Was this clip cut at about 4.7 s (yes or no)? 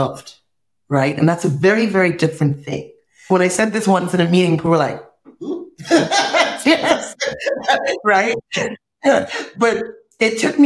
no